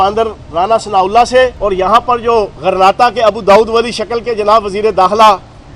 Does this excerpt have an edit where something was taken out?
no; 0 cuts

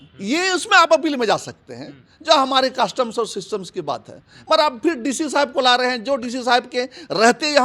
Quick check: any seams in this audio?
no; 0 cuts

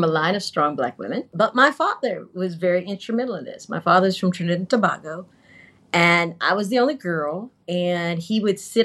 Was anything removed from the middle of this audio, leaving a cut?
yes; 1 cut; at 1.3 s

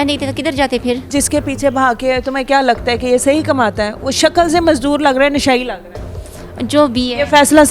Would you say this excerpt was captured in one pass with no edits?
no; 1 cut; at 1.1 s

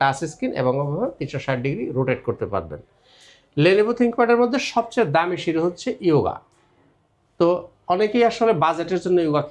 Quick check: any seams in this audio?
no; 0 cuts

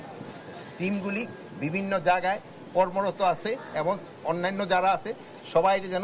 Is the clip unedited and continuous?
yes; 0 cuts

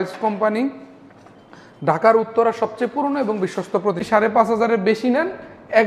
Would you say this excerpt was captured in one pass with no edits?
no; 1 cut; at 4.0 s

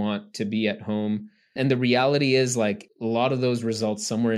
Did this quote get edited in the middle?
yes; 2 cuts; at 1.5 s, 2.9 s

